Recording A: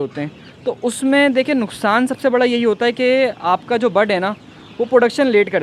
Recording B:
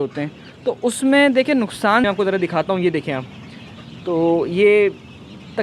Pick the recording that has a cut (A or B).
B